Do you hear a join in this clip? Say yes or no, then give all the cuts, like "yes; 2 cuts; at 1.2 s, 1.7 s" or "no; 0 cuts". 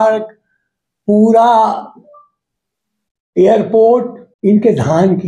yes; 1 cut; at 4.2 s